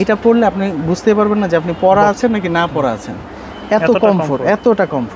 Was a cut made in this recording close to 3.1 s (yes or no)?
no